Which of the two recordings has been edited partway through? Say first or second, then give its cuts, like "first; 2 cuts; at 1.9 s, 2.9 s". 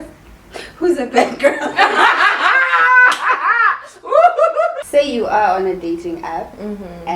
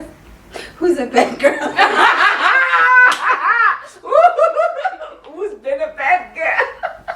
first; 1 cut; at 4.8 s